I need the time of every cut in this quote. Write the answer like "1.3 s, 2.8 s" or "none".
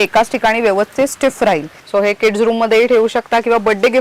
1.8 s